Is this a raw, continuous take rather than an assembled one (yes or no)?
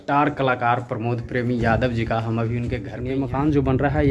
no